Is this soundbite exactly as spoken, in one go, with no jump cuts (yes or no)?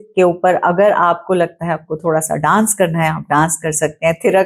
yes